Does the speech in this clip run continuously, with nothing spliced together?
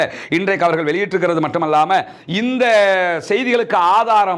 yes; 0 cuts

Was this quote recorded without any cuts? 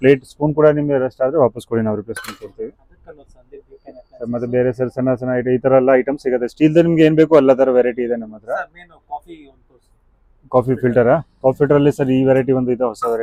yes; 0 cuts

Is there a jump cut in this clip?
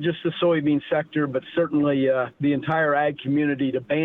yes; 1 cut; at 2.3 s

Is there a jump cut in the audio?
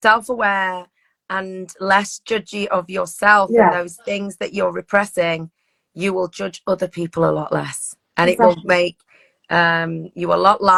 no; 0 cuts

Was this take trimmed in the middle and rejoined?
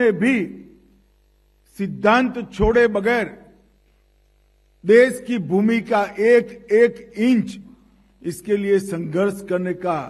no; 0 cuts

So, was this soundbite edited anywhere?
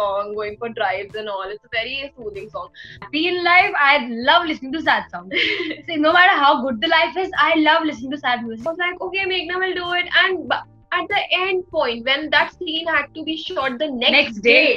yes; 2 cuts; at 3.1 s, 8.6 s

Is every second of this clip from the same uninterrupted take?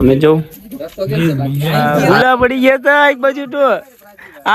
no; 1 cut; at 1.9 s

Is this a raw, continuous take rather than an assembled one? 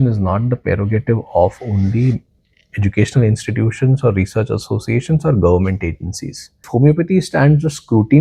no; 1 cut; at 6.7 s

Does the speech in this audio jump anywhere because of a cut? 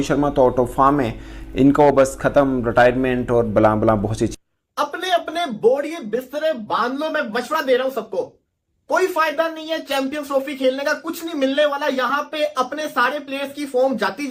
no; 0 cuts

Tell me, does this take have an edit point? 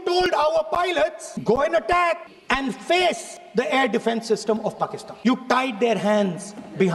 yes; 4 cuts; at 1.3 s, 2.3 s, 3.3 s, 5.0 s

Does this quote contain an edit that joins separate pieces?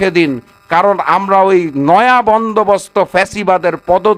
no; 0 cuts

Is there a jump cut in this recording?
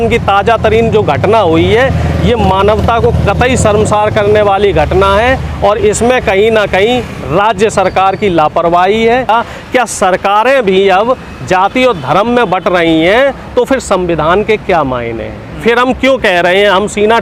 yes; 1 cut; at 9.3 s

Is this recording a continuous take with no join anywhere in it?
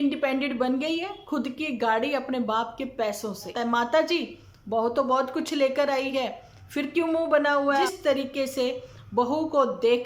no; 2 cuts; at 3.5 s, 7.9 s

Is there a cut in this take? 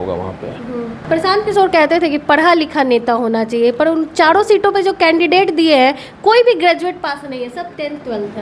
yes; 1 cut; at 1.0 s

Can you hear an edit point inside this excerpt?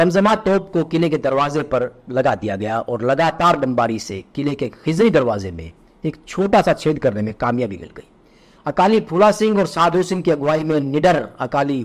no; 0 cuts

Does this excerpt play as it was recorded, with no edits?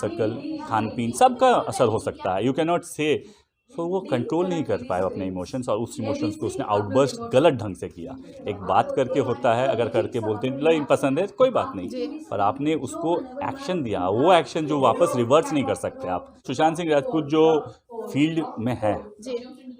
no; 1 cut; at 16.5 s

